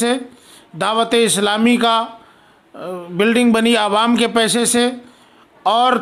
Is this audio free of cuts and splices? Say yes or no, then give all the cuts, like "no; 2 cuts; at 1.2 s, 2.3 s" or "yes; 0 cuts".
yes; 0 cuts